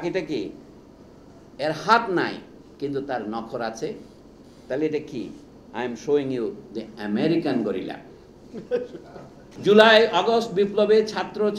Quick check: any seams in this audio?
yes; 1 cut; at 9.4 s

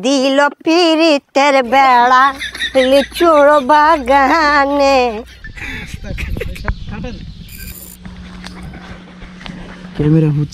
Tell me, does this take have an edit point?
yes; 1 cut; at 7.8 s

